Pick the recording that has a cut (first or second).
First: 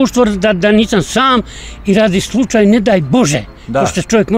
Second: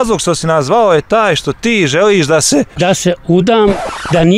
second